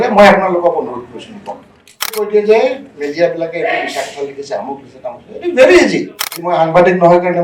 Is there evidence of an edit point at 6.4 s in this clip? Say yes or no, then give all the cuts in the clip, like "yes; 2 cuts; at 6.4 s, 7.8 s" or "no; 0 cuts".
yes; 2 cuts; at 2.3 s, 6.4 s